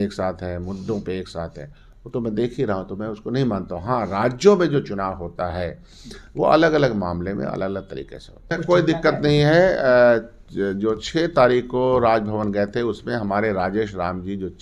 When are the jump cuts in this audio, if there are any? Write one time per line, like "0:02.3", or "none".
0:08.6